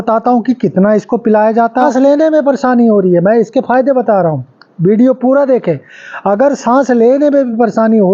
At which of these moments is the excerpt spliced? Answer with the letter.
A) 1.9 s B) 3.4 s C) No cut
A